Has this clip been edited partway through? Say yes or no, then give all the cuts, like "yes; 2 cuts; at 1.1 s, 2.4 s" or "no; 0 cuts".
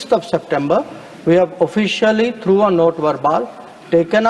no; 0 cuts